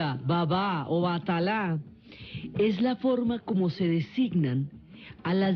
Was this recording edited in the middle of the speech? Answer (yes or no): yes